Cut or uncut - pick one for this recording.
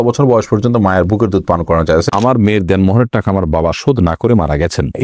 cut